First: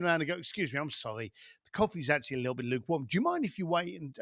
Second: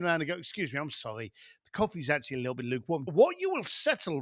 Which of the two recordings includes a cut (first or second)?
second